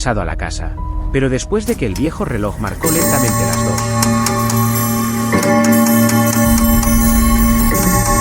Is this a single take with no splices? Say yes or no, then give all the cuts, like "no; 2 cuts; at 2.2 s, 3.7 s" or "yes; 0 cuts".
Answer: yes; 0 cuts